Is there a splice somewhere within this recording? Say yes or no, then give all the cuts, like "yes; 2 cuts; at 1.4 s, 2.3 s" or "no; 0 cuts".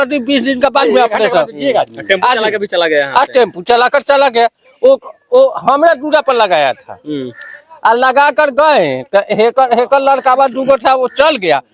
no; 0 cuts